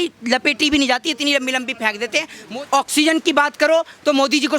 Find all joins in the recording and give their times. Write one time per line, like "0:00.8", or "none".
0:02.4